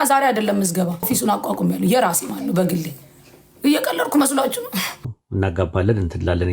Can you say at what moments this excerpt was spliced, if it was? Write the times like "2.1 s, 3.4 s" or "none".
1.1 s, 5.1 s